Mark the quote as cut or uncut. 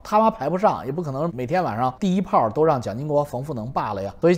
cut